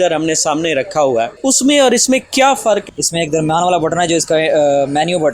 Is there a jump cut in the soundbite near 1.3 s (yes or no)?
yes